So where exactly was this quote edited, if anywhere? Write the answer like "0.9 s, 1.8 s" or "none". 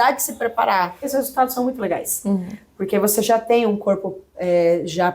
1.1 s